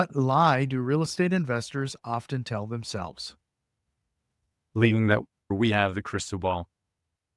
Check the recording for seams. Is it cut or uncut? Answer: uncut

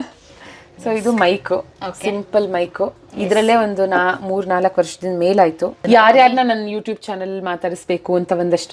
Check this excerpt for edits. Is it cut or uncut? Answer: cut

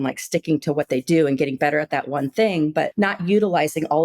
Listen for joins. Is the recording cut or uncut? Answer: cut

